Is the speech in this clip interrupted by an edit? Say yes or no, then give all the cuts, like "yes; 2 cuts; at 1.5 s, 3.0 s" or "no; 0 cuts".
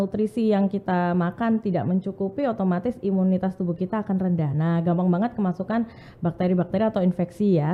no; 0 cuts